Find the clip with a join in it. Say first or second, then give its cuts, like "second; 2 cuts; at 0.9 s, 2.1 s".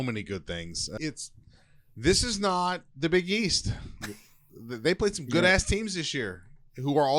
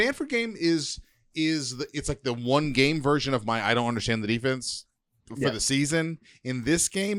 first; 1 cut; at 1.0 s